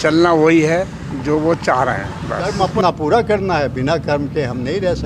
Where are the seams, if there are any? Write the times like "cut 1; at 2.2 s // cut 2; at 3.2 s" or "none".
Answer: cut 1; at 2.5 s